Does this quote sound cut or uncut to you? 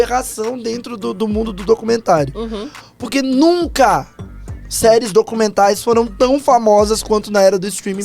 uncut